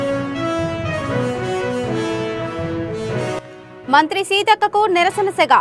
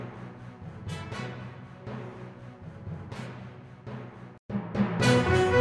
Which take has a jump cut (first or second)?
first